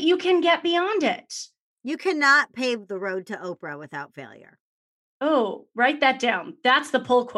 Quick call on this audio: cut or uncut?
uncut